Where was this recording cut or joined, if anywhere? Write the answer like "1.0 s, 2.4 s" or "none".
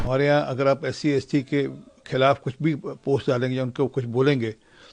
none